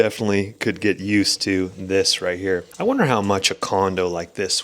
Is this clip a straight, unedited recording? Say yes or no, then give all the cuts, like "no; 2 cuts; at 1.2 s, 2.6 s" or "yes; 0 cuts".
no; 1 cut; at 2.7 s